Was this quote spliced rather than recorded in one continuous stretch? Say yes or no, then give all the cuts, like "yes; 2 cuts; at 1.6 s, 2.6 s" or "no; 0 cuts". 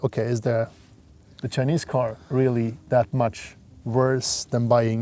no; 0 cuts